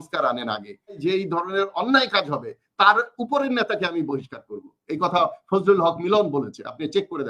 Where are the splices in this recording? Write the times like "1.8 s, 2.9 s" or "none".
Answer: 1.0 s